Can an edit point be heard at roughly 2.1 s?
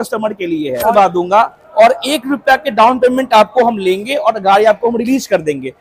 no; 1 cut; at 0.9 s

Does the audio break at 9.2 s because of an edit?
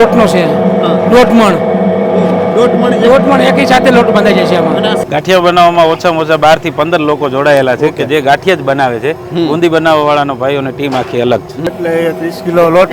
no; 2 cuts; at 5.0 s, 11.7 s

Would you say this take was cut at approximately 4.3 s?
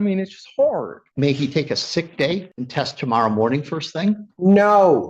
yes; 3 cuts; at 1.0 s, 2.6 s, 4.3 s

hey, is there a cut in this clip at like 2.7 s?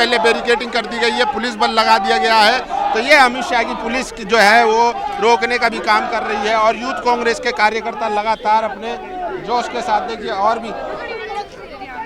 no; 0 cuts

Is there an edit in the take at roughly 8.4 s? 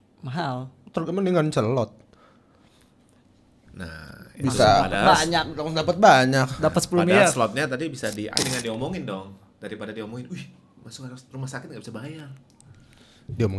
yes; 1 cut; at 8.4 s

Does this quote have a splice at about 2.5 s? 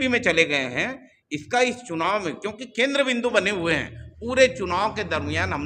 no; 0 cuts

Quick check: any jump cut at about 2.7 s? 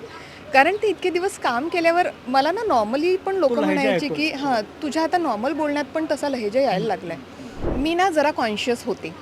no; 1 cut; at 7.6 s

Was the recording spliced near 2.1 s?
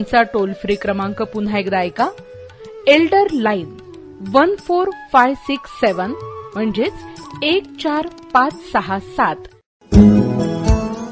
no; 1 cut; at 9.7 s

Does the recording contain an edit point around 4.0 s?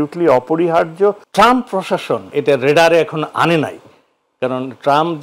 no; 2 cuts; at 1.2 s, 2.3 s

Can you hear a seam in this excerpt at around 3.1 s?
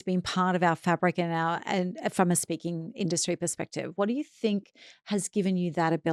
no; 0 cuts

